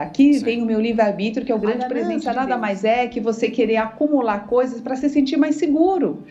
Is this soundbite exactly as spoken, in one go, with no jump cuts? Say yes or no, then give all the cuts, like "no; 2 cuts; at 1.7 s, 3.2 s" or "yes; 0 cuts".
no; 1 cut; at 2.0 s